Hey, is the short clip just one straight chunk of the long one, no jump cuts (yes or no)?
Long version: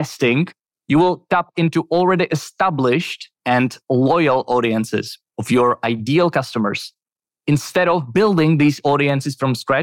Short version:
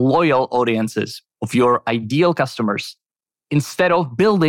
yes